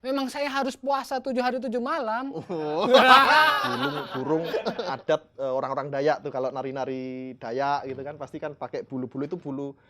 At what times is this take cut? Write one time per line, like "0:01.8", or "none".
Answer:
0:03.7